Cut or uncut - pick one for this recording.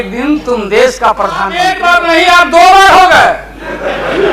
cut